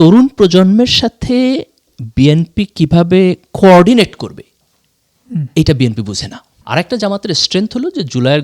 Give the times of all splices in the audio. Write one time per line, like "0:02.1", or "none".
0:06.4

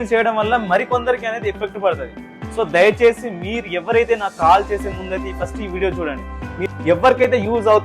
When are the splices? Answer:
0:06.7

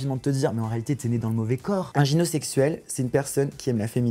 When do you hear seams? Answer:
0:01.9

